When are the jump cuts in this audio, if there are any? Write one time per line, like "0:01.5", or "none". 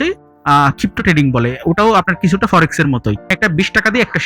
0:03.3